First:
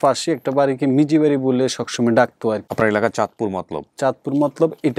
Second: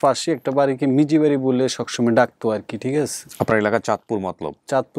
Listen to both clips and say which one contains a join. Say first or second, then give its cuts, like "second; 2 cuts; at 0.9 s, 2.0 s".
first; 1 cut; at 2.7 s